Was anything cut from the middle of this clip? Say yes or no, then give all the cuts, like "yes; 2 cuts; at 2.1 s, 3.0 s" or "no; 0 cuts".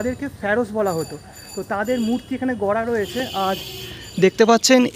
no; 0 cuts